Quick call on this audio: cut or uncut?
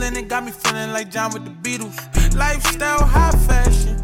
uncut